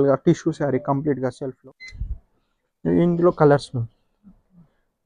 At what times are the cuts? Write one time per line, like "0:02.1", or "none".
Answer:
0:01.5